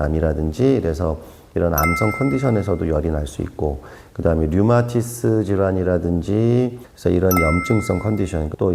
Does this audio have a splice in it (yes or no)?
no